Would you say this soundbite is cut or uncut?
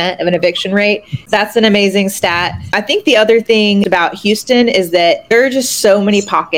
cut